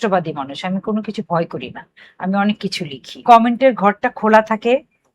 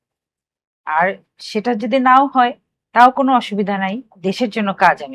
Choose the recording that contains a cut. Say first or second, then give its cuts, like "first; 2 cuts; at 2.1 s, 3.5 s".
first; 1 cut; at 3.2 s